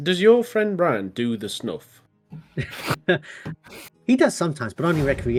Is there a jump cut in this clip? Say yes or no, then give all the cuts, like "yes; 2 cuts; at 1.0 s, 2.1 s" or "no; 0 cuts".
no; 0 cuts